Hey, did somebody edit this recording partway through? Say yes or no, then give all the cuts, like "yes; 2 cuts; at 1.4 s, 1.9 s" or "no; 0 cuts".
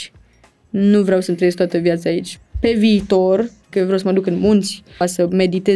yes; 3 cuts; at 2.3 s, 3.7 s, 5.0 s